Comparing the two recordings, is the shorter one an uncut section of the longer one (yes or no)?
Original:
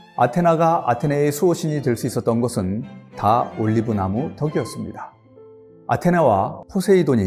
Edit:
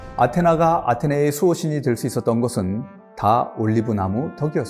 yes